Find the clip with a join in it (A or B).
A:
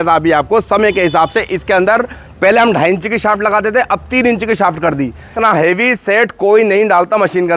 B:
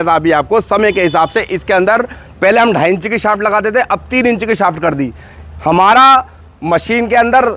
A